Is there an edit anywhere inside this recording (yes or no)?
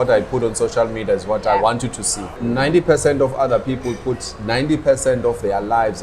yes